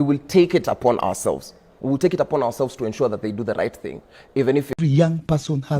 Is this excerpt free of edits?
no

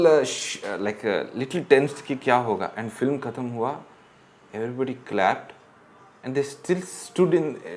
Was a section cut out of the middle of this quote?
no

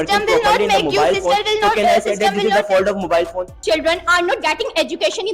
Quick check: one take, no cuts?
no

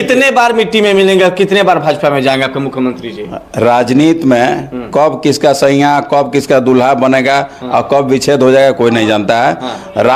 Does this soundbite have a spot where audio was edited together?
no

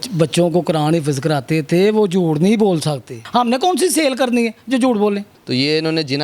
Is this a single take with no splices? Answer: no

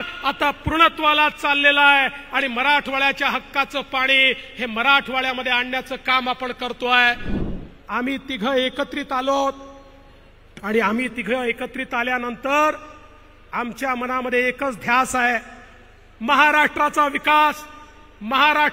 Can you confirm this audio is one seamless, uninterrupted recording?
no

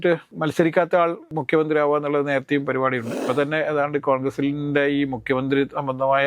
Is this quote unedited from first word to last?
no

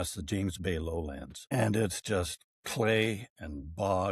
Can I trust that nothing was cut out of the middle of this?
no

